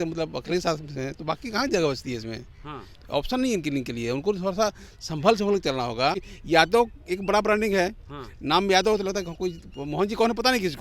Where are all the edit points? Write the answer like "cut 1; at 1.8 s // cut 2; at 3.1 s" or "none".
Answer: cut 1; at 6.3 s